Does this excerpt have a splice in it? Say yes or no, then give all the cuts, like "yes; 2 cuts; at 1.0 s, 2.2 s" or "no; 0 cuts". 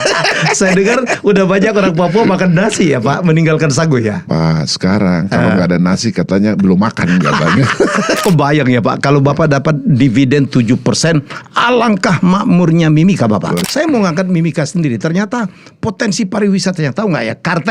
yes; 2 cuts; at 8.2 s, 13.6 s